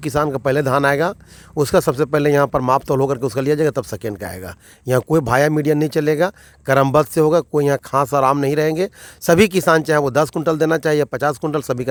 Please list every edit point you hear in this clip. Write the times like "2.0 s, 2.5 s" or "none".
none